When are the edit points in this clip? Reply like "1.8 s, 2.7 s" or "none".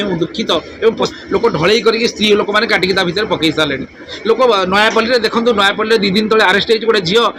1.1 s